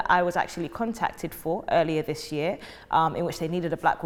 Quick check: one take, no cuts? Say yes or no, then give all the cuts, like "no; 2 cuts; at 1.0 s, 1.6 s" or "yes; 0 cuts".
yes; 0 cuts